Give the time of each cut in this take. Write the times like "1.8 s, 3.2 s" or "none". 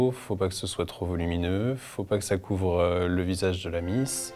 none